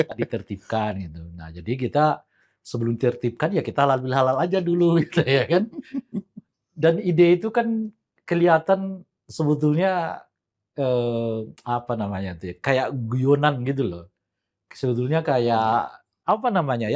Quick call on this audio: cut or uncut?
uncut